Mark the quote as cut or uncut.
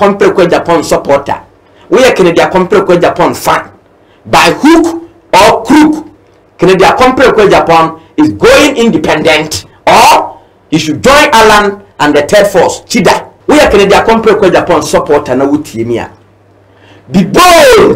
cut